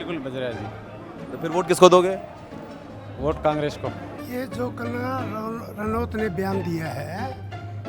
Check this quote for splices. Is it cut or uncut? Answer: cut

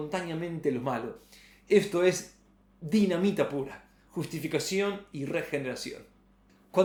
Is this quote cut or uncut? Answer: uncut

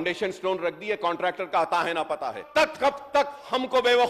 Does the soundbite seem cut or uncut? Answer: cut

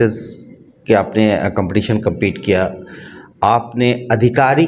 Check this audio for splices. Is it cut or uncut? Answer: uncut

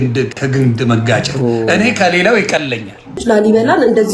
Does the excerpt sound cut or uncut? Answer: cut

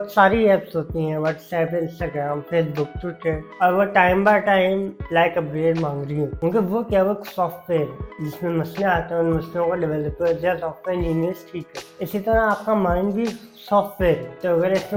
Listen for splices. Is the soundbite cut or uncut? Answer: uncut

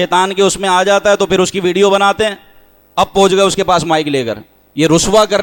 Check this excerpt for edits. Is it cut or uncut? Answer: uncut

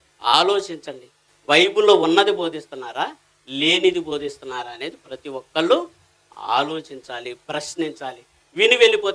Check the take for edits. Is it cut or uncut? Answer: uncut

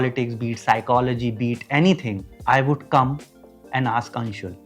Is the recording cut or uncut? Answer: uncut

